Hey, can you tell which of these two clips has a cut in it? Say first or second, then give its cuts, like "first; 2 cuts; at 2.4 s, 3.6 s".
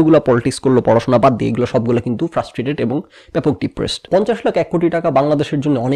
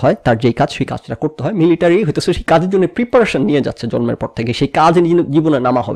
first; 1 cut; at 4.1 s